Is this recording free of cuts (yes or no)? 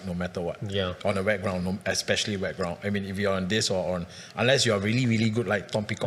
yes